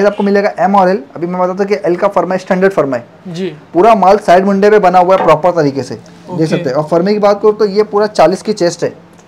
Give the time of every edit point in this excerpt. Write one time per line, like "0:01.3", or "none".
none